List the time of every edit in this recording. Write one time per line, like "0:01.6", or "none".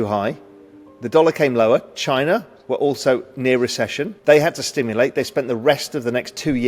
0:04.1